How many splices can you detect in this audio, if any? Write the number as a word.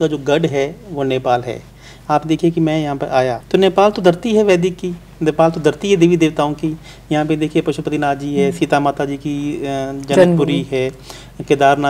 one